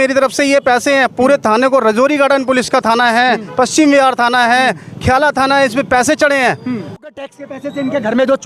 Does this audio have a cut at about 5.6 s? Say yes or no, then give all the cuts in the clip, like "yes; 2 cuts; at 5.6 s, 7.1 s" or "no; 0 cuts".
no; 1 cut; at 7.1 s